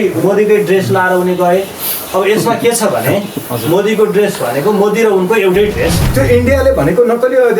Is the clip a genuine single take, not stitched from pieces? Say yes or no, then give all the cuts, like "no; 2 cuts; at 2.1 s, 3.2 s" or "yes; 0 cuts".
no; 1 cut; at 6.0 s